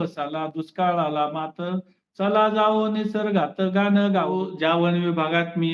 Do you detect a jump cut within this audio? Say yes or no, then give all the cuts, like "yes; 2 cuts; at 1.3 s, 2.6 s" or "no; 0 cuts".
yes; 1 cut; at 4.4 s